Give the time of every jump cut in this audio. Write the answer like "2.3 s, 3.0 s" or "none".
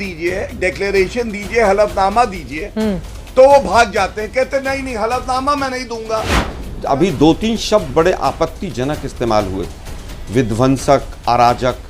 6.7 s